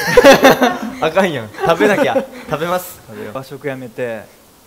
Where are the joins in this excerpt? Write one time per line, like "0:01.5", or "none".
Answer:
0:03.4